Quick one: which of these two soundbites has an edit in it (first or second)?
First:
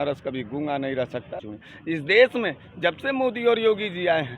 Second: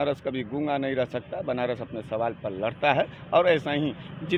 first